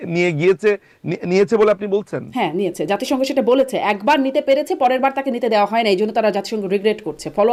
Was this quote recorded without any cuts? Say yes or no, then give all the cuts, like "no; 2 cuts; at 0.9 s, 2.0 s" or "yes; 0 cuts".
yes; 0 cuts